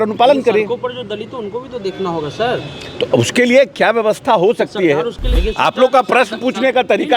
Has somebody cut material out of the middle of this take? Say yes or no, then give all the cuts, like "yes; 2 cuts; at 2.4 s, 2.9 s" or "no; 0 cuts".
yes; 1 cut; at 5.3 s